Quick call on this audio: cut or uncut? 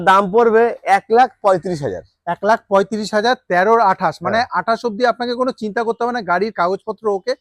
uncut